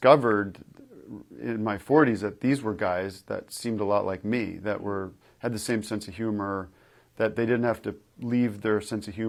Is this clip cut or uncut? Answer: uncut